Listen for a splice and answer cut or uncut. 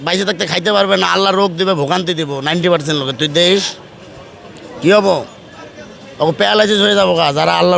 uncut